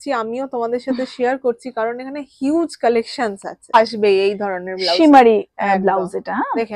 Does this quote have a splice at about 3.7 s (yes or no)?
yes